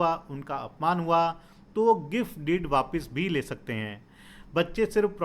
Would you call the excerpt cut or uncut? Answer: uncut